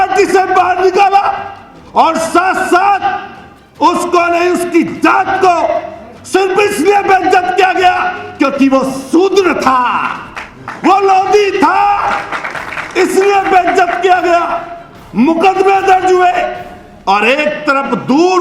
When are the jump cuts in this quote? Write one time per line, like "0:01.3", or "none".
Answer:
none